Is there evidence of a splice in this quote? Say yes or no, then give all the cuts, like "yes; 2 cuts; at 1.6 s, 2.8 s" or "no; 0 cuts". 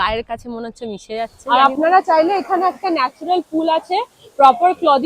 yes; 1 cut; at 1.4 s